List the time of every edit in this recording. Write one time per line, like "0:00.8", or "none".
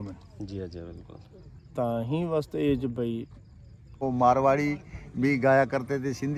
0:04.0